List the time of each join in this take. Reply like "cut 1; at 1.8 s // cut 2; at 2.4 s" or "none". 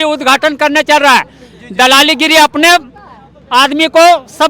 none